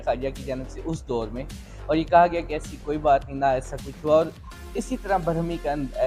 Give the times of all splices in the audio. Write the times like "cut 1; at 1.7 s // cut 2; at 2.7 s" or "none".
none